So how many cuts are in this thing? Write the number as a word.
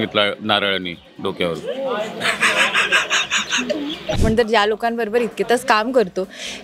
one